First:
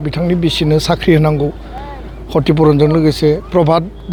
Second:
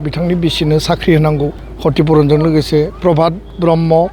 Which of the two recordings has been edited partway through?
second; 1 cut; at 1.6 s

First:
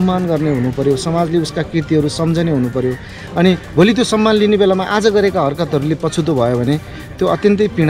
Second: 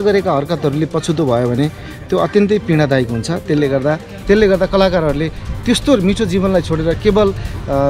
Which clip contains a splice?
second; 1 cut; at 4.1 s

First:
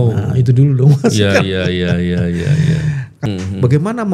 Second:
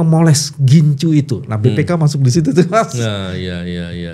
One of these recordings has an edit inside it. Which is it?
first; 1 cut; at 3.1 s

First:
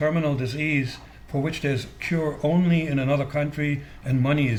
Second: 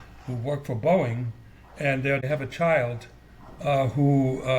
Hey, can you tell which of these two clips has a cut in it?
second; 1 cut; at 2.2 s

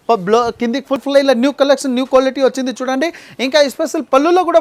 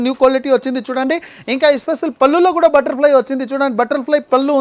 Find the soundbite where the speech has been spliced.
first; 1 cut; at 1.0 s

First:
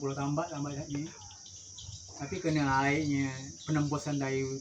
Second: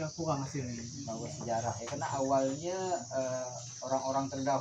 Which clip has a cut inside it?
second; 1 cut; at 0.9 s

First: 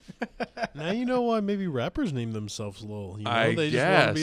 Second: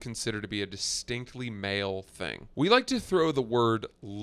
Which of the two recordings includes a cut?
second; 1 cut; at 2.4 s

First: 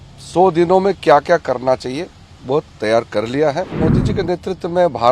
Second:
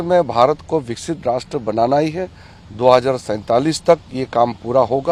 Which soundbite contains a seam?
first; 1 cut; at 3.7 s

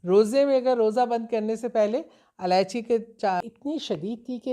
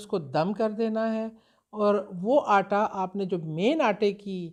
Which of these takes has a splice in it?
first; 1 cut; at 3.4 s

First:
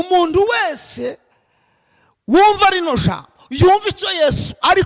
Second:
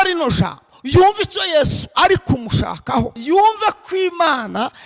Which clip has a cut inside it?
second; 1 cut; at 3.2 s

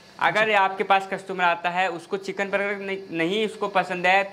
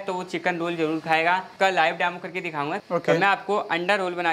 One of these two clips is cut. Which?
second; 2 cuts; at 1.5 s, 2.8 s

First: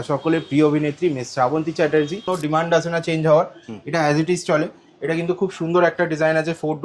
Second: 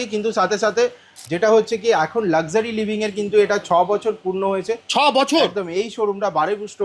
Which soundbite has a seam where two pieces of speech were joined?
first; 1 cut; at 2.2 s

